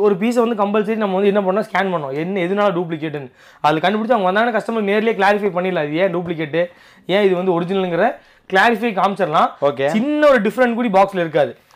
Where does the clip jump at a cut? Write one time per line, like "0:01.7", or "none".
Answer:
none